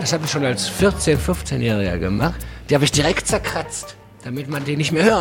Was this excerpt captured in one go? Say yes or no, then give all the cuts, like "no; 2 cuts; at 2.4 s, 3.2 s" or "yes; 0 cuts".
no; 2 cuts; at 2.4 s, 4.1 s